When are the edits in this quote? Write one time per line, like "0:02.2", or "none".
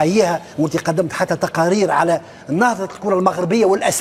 none

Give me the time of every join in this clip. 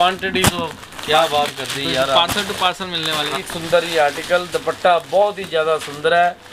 0:03.3

